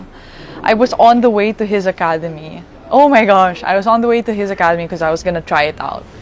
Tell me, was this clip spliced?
no; 0 cuts

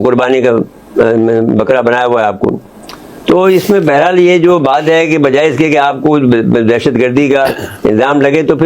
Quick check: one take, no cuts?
yes; 0 cuts

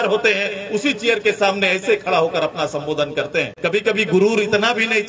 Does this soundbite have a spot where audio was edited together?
yes; 1 cut; at 3.5 s

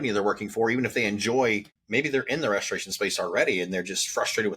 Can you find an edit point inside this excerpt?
yes; 1 cut; at 1.7 s

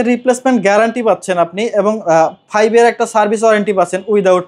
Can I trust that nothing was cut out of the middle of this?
yes; 0 cuts

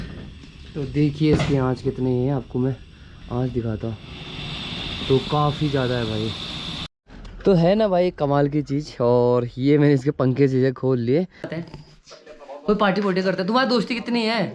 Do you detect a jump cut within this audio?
yes; 2 cuts; at 6.9 s, 11.5 s

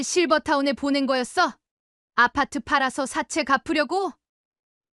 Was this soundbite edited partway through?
no; 0 cuts

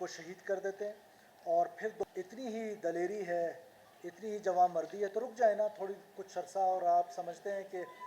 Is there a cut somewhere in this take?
yes; 1 cut; at 2.0 s

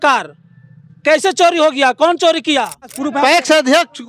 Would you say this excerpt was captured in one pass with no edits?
no; 1 cut; at 3.0 s

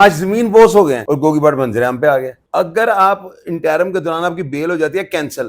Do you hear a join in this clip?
yes; 2 cuts; at 1.0 s, 2.4 s

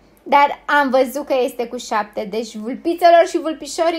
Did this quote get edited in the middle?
no; 0 cuts

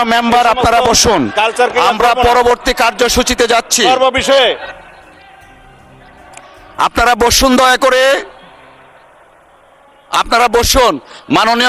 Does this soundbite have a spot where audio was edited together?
no; 0 cuts

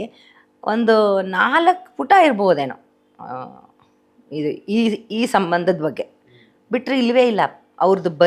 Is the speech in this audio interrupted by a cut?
no; 0 cuts

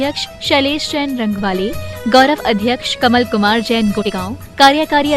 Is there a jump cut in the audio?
yes; 1 cut; at 4.1 s

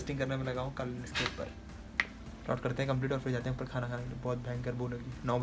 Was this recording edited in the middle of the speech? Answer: no; 0 cuts

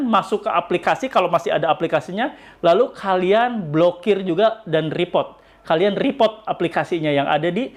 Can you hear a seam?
no; 0 cuts

